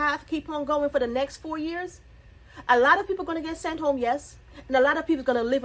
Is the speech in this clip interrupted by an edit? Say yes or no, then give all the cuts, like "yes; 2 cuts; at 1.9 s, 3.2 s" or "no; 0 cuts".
no; 0 cuts